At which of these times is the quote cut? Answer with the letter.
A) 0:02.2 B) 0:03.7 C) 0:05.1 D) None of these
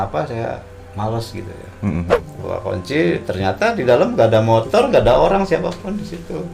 A